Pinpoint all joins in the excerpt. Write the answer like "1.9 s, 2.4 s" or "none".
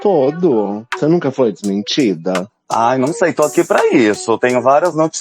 0.9 s, 2.5 s

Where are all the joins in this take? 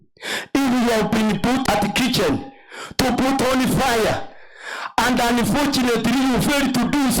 1.6 s

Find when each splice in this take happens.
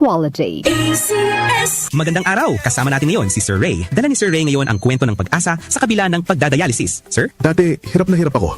1.9 s

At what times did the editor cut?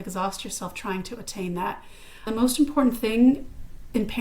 2.3 s

